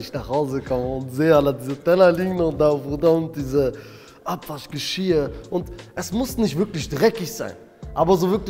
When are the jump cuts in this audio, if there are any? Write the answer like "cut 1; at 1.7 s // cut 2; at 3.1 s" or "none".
none

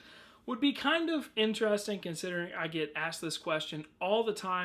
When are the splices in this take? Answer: cut 1; at 3.7 s

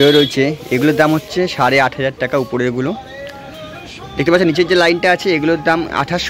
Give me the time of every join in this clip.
none

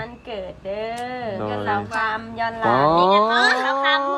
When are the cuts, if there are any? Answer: cut 1; at 2.6 s

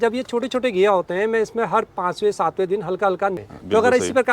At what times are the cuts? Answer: cut 1; at 3.4 s

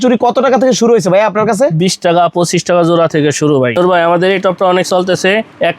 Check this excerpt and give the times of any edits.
cut 1; at 3.8 s

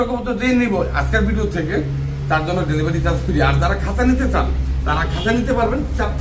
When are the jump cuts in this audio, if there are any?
none

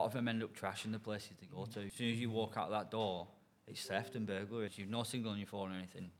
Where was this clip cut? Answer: cut 1; at 1.9 s // cut 2; at 4.8 s

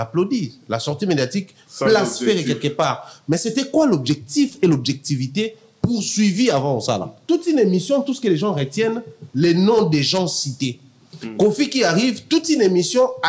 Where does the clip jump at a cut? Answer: cut 1; at 7.2 s

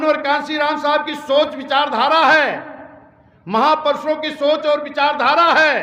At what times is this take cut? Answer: none

